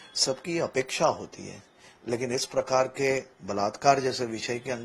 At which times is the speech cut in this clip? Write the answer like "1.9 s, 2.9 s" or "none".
none

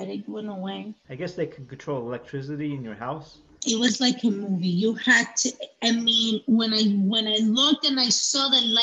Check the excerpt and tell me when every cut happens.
none

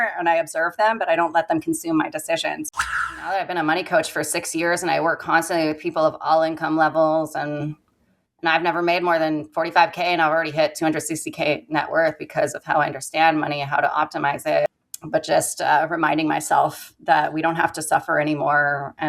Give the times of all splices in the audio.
2.9 s, 14.9 s

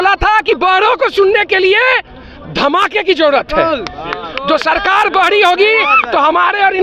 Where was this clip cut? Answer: none

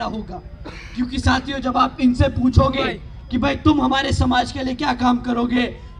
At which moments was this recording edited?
none

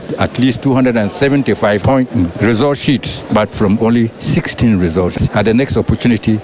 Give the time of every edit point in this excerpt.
5.2 s

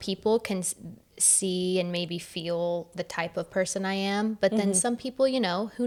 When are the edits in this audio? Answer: none

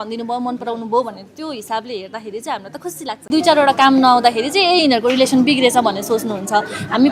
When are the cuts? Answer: 3.2 s

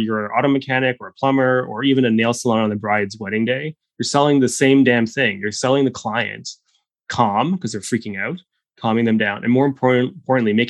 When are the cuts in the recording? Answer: none

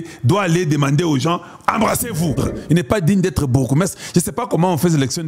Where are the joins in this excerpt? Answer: 2.4 s

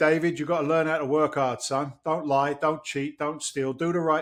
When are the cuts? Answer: none

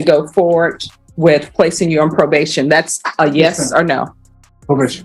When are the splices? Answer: none

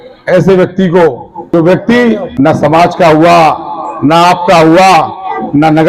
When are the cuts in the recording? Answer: 1.5 s, 2.3 s

